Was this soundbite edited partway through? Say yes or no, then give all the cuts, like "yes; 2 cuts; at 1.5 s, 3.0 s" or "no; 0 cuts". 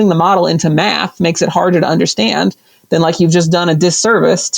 no; 0 cuts